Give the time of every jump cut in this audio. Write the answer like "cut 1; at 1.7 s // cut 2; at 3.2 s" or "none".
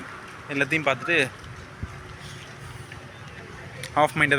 none